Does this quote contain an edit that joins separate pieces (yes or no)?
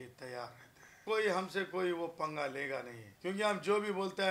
yes